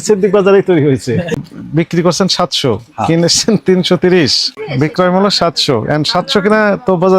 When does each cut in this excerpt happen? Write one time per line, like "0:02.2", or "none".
0:01.4
0:04.7